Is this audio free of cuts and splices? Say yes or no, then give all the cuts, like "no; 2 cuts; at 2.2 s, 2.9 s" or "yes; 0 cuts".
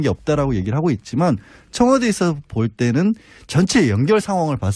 no; 1 cut; at 3.5 s